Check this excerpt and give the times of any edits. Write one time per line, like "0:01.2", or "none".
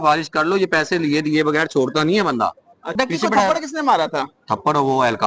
0:02.8

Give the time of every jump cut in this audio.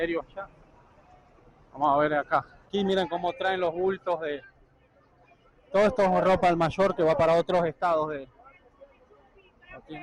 0:02.7

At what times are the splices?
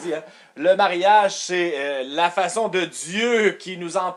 none

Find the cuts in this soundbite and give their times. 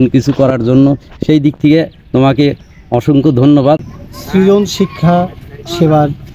0:03.8

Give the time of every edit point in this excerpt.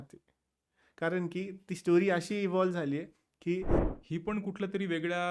0:03.8

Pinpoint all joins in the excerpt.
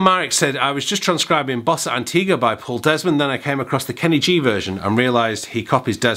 none

